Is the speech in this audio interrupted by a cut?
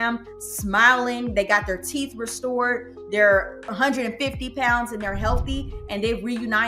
yes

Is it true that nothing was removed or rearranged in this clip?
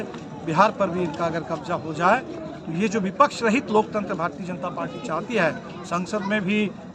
yes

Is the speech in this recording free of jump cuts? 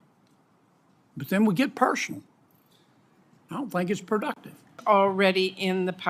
no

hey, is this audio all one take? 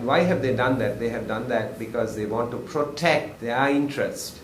no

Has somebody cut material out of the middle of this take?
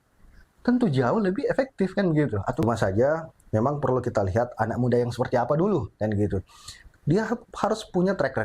yes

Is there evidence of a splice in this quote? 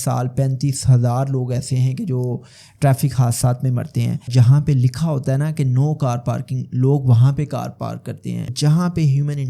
yes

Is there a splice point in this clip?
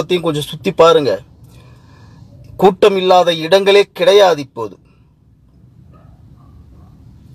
no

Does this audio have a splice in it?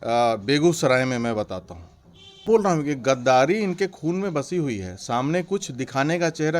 yes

